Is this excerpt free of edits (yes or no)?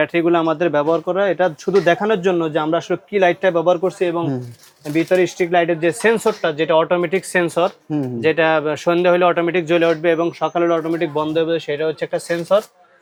yes